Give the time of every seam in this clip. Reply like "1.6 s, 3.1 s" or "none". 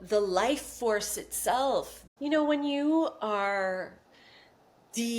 2.0 s